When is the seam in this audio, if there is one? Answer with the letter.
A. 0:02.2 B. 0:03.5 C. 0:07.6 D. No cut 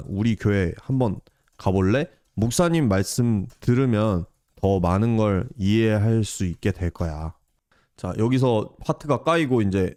D